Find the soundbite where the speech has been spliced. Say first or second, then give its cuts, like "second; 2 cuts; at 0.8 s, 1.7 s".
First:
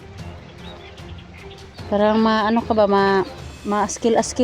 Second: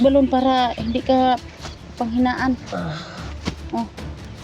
first; 1 cut; at 1.9 s